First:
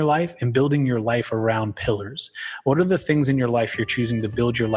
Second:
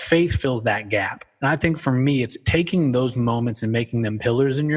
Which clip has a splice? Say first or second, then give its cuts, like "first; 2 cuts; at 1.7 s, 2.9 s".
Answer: second; 2 cuts; at 1.2 s, 2.4 s